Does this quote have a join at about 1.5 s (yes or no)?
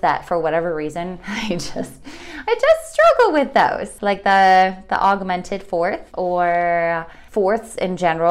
no